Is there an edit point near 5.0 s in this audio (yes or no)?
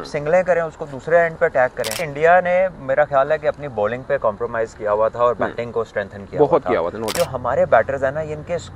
no